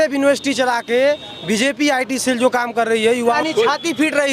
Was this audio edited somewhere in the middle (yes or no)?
yes